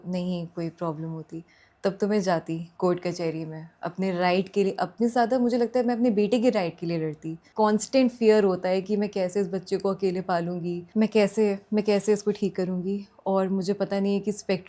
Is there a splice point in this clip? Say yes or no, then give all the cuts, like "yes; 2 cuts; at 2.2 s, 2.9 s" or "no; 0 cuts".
yes; 2 cuts; at 7.4 s, 10.8 s